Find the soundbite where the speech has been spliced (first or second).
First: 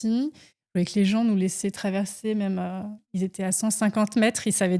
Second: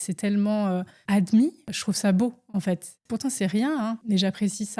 second